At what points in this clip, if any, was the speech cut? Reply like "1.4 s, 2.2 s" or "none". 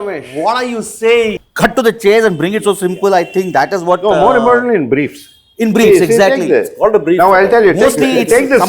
1.3 s